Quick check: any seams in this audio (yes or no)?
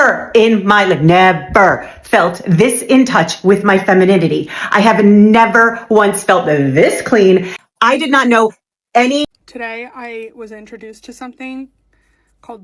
yes